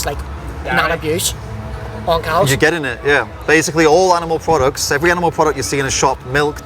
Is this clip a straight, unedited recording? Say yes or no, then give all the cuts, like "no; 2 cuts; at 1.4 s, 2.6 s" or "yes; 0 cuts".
yes; 0 cuts